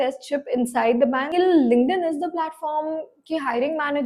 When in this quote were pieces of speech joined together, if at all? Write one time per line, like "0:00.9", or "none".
0:01.3